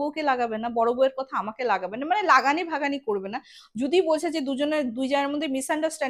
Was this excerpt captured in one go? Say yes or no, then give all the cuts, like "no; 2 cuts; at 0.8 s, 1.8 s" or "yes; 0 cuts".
yes; 0 cuts